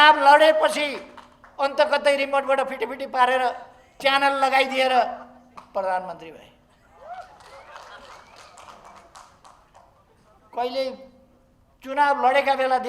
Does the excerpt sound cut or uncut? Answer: uncut